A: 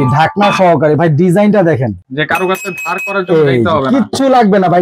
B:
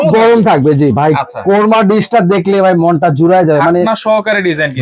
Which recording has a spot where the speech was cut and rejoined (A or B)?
A